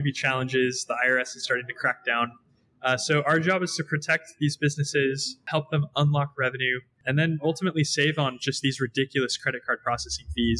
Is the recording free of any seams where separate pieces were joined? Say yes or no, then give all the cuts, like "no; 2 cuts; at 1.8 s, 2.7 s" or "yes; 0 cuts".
no; 2 cuts; at 5.5 s, 7.0 s